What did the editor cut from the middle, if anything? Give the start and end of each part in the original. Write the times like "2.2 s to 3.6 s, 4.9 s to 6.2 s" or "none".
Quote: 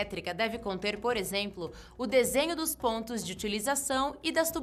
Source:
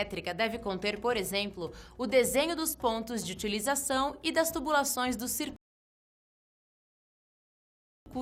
none